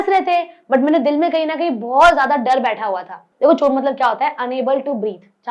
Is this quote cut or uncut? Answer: cut